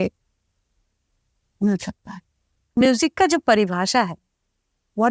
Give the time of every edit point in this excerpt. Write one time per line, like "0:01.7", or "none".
0:02.8